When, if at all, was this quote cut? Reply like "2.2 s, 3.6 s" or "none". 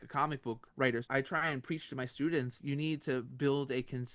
1.0 s, 2.6 s